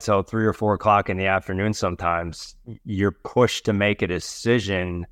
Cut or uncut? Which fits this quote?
uncut